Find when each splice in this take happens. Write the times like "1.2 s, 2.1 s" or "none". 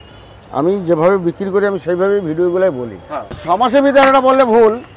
3.4 s